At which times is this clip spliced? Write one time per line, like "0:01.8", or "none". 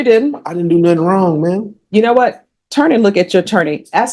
none